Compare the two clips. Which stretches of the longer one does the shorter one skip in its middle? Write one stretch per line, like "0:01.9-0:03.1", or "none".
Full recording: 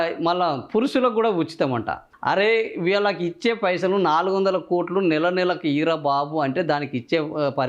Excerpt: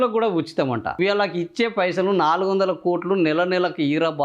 0:02.0-0:02.8